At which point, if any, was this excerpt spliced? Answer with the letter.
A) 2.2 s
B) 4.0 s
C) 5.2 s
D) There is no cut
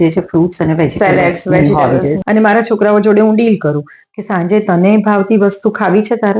A